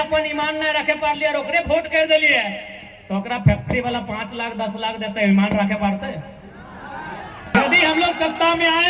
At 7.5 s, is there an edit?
yes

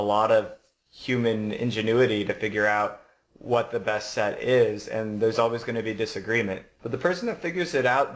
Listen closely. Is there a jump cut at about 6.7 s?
yes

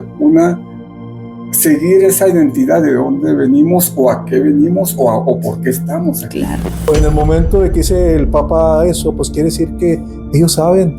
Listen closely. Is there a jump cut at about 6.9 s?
yes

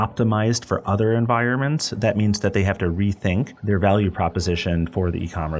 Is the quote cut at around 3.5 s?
yes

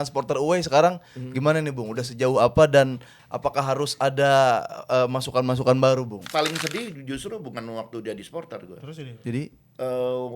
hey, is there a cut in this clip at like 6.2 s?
yes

